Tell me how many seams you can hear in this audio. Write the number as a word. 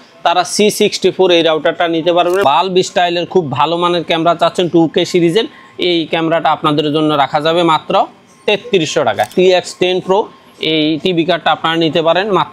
two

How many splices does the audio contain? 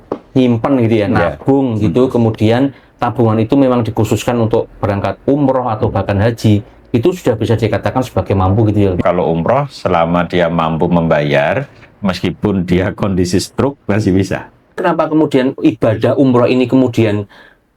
two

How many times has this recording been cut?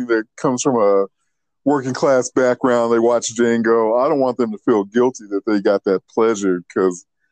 zero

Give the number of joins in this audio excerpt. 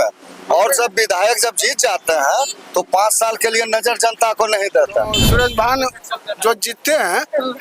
one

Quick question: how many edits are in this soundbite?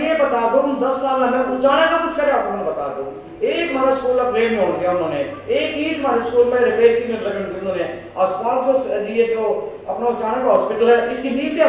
zero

